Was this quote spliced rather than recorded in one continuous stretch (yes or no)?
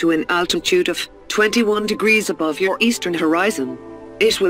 yes